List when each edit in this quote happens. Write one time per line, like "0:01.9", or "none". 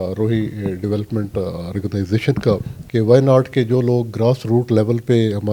0:02.8

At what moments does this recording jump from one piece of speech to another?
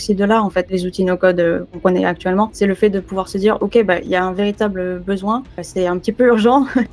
0:00.7
0:01.8
0:02.5
0:05.6

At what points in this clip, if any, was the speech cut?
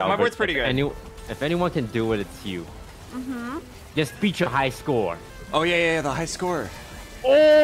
0:03.8
0:05.3

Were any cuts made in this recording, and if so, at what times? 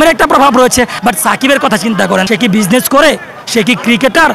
0:00.9
0:02.3

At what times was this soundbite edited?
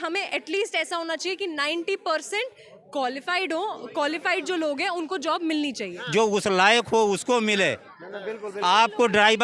0:06.0

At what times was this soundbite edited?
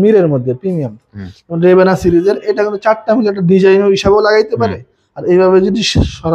none

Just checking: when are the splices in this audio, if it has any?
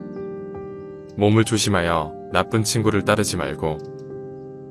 none

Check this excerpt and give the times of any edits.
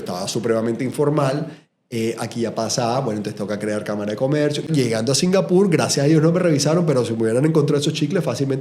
0:04.7

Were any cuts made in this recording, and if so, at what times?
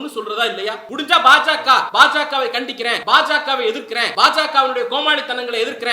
0:00.8
0:01.9
0:03.0
0:04.1

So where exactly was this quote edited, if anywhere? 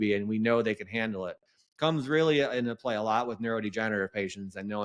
none

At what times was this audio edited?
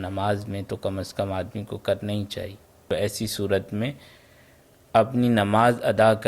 0:02.9

